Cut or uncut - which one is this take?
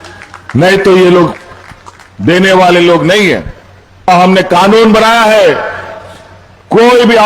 cut